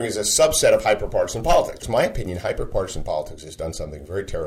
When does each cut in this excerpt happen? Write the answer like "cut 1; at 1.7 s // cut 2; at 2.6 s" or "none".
cut 1; at 1.8 s